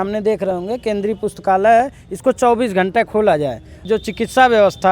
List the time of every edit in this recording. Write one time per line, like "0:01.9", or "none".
0:03.9

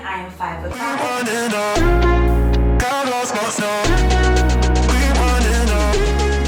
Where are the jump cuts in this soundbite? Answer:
none

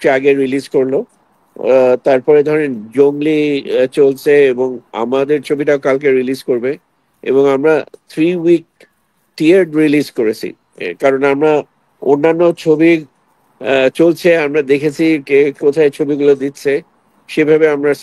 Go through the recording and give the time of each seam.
none

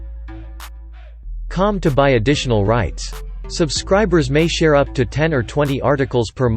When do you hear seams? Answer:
0:01.4

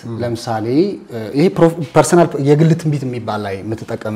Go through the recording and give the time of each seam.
none

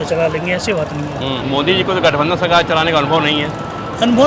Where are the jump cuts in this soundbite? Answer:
0:01.4

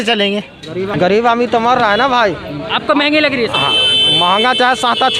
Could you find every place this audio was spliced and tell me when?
0:00.9

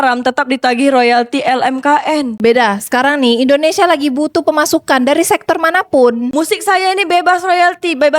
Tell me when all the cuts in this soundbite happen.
0:06.3

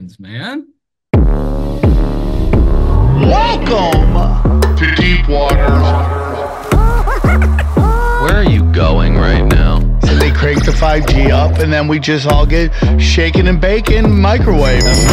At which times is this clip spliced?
0:01.0

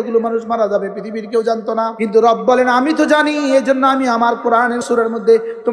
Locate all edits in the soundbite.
0:01.9
0:04.8

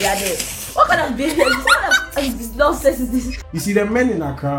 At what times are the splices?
0:03.4

